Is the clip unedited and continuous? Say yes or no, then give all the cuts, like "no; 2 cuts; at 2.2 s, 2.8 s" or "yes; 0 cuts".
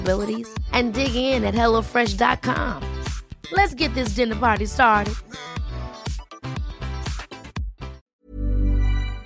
no; 1 cut; at 8.1 s